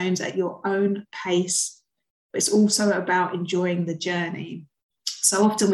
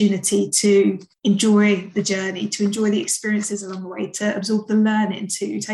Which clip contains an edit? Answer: second; 1 cut; at 1.1 s

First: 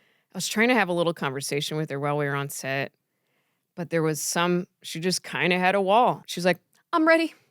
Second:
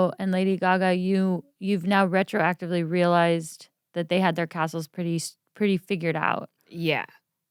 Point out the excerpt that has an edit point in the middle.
first; 1 cut; at 6.3 s

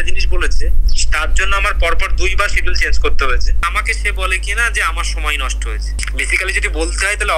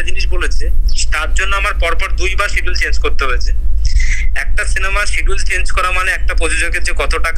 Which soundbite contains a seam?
first; 2 cuts; at 3.5 s, 5.9 s

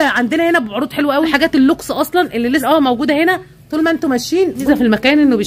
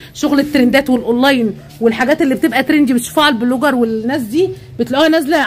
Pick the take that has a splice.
first; 3 cuts; at 1.3 s, 2.6 s, 4.7 s

